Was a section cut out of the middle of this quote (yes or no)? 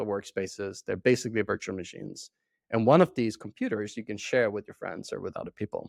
no